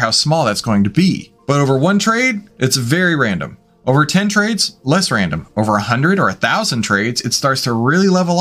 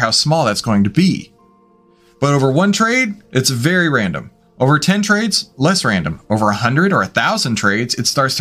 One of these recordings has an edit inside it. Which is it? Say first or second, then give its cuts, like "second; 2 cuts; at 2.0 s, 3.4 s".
first; 1 cut; at 1.3 s